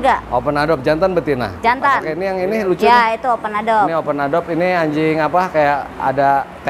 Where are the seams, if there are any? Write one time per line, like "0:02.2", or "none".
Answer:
0:02.1